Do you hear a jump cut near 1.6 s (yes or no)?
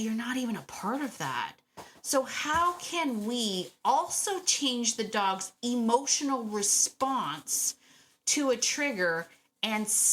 no